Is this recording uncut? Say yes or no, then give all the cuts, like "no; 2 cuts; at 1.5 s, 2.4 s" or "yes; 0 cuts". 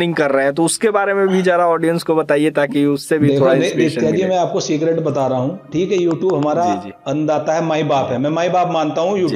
yes; 0 cuts